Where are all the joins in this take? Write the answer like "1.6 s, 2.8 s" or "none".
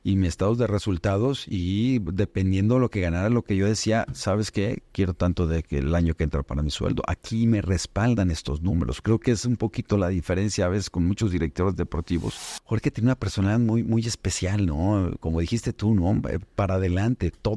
12.5 s